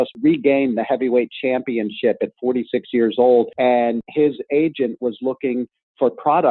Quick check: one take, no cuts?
no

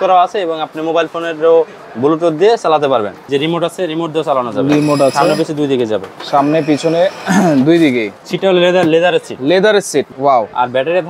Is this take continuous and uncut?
no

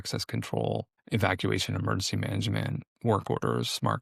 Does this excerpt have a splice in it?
yes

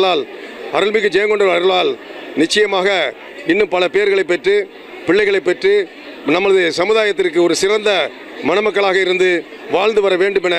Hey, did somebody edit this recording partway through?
no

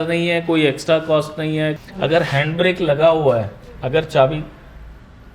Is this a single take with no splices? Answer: no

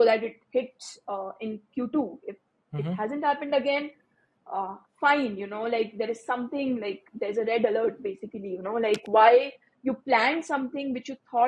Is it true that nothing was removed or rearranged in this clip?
yes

